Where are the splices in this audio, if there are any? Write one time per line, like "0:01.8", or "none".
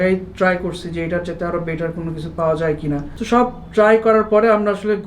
0:03.1